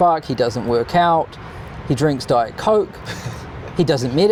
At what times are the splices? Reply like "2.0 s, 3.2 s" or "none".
none